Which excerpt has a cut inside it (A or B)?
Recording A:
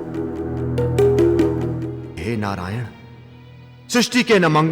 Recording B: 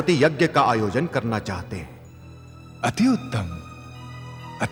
A